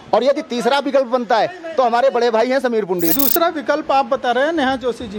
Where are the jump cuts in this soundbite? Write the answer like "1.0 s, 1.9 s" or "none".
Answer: 3.1 s